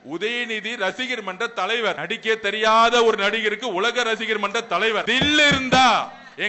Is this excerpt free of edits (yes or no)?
no